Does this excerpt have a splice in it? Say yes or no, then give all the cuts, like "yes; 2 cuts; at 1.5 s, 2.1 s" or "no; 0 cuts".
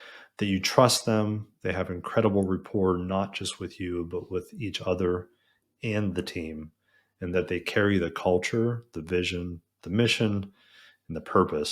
no; 0 cuts